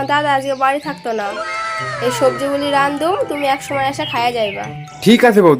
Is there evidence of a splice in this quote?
no; 0 cuts

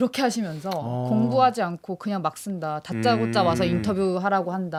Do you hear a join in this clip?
no; 0 cuts

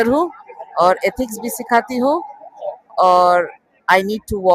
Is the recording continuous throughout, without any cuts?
yes; 0 cuts

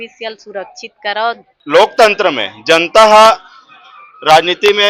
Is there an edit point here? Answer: yes; 1 cut; at 1.5 s

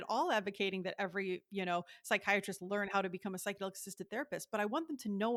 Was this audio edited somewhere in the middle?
no; 0 cuts

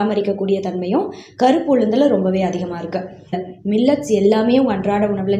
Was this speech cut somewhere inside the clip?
yes; 1 cut; at 3.4 s

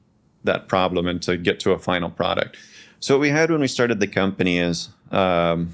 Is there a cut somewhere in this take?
no; 0 cuts

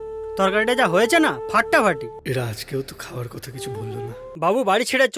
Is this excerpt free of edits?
no; 2 cuts; at 2.2 s, 4.3 s

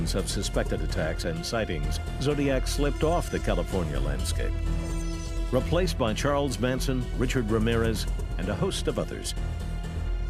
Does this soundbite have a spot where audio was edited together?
yes; 1 cut; at 3.8 s

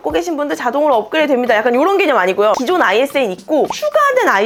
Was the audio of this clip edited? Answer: no; 0 cuts

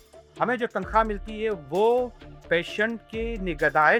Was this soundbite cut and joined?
no; 0 cuts

